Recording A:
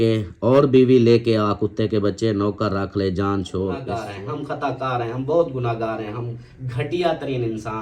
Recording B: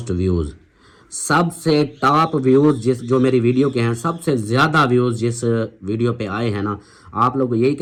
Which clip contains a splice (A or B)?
A